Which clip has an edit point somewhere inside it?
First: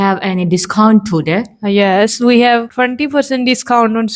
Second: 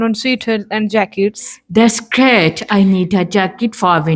first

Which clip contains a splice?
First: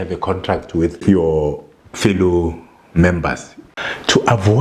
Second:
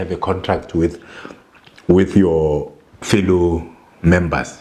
first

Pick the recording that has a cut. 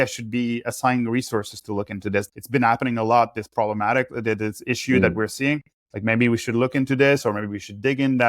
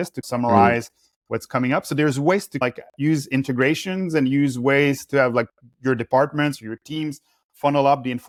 first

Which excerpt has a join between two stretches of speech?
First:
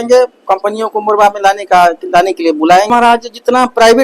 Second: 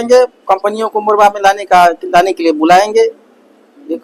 first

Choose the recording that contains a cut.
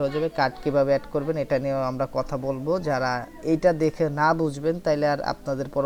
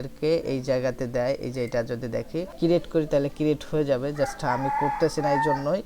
second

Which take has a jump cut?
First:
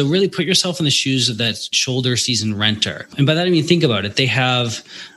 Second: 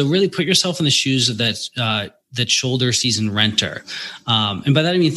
first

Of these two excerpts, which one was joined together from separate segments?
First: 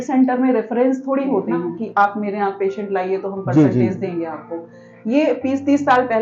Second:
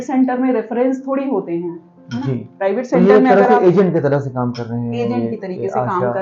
first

